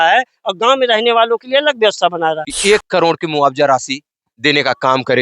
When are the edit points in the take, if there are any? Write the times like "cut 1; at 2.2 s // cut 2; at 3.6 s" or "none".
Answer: cut 1; at 2.5 s